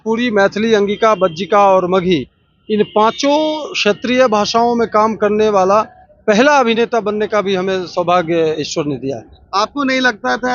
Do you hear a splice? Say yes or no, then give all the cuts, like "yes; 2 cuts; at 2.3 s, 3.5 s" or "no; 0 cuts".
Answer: no; 0 cuts